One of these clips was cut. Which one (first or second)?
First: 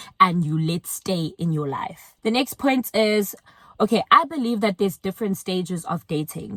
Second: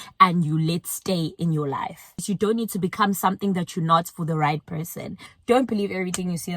second